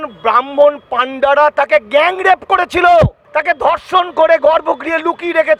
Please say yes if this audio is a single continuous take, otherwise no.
yes